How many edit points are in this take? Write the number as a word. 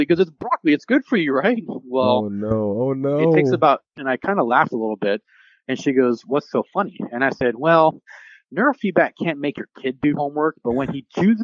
one